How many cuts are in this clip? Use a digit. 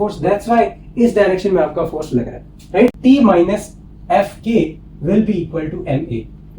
1